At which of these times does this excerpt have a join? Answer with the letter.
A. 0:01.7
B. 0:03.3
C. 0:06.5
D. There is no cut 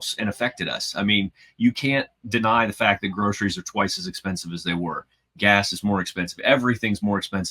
D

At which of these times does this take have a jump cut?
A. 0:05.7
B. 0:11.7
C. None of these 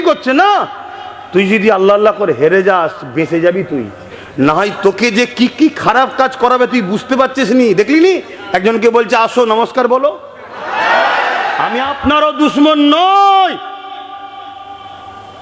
B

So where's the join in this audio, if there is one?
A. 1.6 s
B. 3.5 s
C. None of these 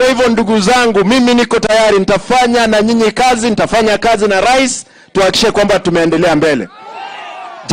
A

